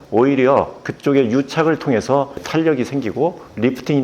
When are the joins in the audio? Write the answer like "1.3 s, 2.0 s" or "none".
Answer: 2.4 s